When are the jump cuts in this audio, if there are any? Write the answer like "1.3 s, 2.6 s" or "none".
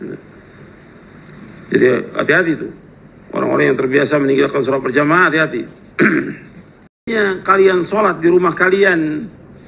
7.1 s